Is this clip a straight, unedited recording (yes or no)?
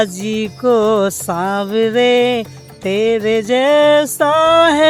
yes